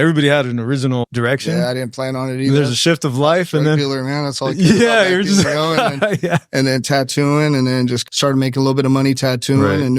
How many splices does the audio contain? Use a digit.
1